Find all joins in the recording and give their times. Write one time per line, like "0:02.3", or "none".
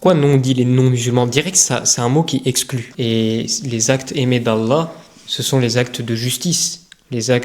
0:02.8